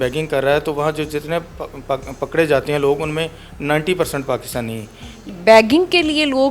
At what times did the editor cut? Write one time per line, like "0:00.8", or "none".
0:05.3